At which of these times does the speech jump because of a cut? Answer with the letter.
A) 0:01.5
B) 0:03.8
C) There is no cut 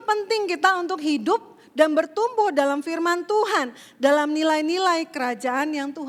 C